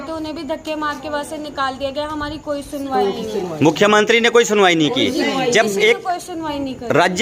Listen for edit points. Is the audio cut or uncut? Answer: uncut